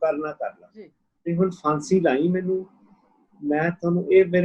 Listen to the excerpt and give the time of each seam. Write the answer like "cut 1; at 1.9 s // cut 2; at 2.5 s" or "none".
cut 1; at 1.0 s